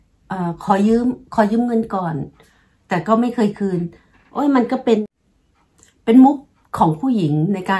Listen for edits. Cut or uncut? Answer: cut